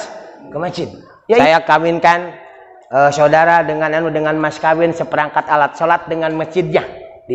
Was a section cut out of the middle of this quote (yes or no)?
yes